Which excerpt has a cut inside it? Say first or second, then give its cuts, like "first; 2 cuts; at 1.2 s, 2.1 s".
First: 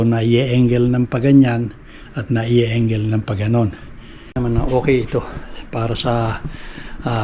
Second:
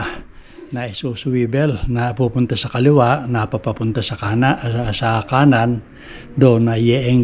first; 1 cut; at 4.4 s